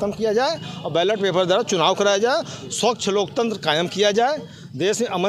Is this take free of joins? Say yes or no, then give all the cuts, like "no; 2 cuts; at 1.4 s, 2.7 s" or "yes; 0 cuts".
yes; 0 cuts